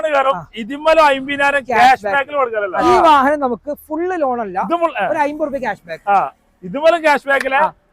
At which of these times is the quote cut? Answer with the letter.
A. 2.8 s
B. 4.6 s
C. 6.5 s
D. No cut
A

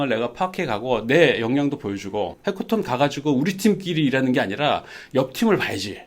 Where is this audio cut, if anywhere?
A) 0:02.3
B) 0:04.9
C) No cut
A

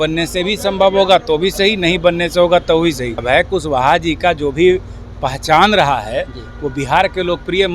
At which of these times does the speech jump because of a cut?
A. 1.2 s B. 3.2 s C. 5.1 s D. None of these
B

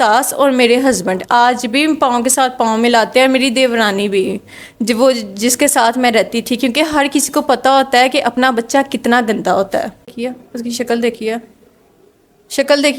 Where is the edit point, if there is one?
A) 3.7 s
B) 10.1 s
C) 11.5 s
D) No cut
B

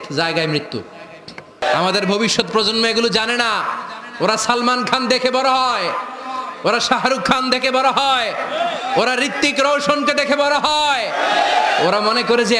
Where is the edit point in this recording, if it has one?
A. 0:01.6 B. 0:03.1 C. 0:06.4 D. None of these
A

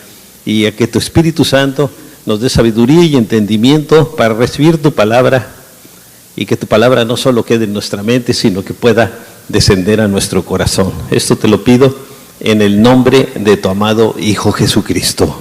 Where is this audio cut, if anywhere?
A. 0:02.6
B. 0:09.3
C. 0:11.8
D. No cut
C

